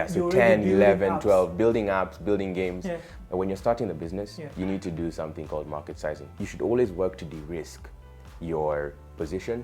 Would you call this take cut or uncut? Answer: cut